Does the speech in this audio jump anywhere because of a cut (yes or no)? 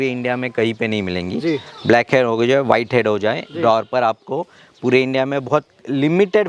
no